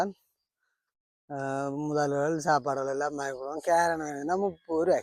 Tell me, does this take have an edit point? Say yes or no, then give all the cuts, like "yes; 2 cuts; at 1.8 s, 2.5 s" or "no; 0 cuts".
no; 0 cuts